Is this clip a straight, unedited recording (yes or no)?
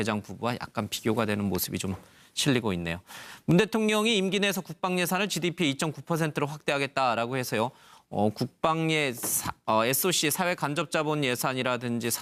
yes